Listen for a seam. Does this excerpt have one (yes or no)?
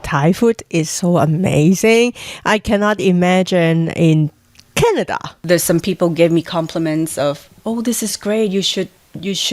yes